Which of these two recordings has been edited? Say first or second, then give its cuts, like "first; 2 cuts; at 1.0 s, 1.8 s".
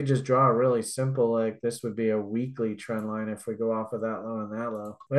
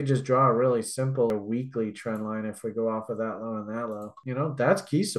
second; 2 cuts; at 1.3 s, 4.2 s